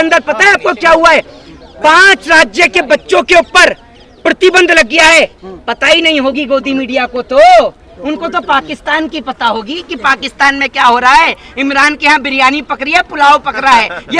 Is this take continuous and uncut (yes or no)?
yes